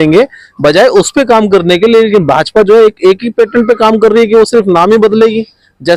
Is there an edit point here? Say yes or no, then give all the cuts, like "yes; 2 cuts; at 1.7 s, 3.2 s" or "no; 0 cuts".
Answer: no; 0 cuts